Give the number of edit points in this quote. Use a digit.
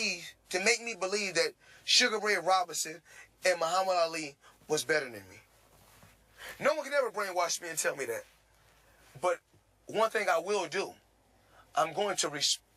1